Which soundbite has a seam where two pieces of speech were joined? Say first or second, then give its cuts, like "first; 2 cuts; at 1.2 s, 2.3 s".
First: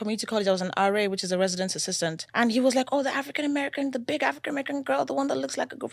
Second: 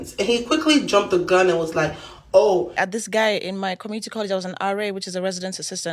second; 1 cut; at 2.8 s